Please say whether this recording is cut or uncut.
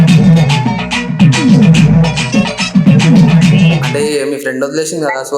cut